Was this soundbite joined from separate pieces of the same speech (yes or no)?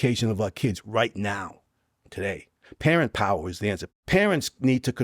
yes